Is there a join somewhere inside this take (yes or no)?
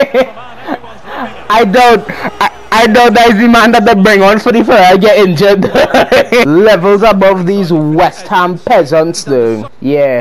yes